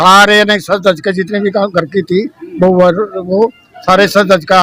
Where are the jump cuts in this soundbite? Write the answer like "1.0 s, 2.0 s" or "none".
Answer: none